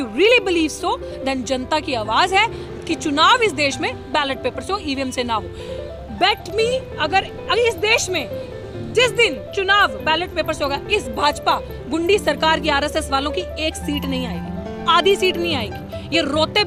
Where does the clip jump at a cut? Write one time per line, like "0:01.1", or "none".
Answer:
none

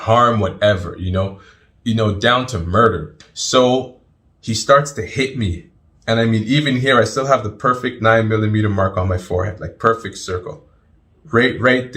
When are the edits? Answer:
0:03.1

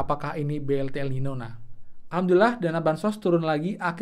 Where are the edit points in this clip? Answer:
0:02.0

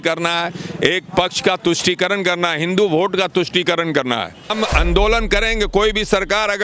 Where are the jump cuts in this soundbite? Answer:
0:04.5

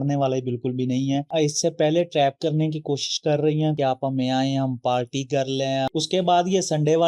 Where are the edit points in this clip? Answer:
0:01.3
0:03.8
0:05.9

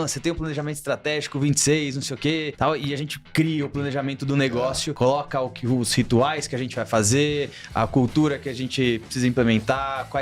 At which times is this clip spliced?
0:02.5
0:04.9

